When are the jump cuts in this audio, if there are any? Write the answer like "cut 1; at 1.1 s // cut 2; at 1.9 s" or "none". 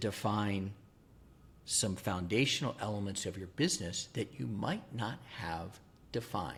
none